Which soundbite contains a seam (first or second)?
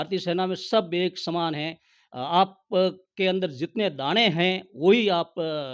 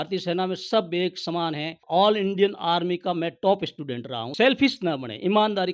second